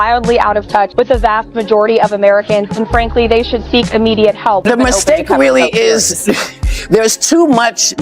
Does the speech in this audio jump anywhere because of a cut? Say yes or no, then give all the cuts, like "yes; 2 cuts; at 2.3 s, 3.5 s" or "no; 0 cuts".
yes; 2 cuts; at 0.9 s, 4.6 s